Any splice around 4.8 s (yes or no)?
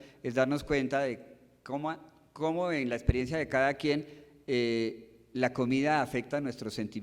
yes